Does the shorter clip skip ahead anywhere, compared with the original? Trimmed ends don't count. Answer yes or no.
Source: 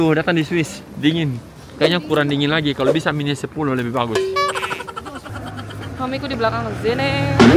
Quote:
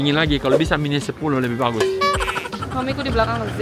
yes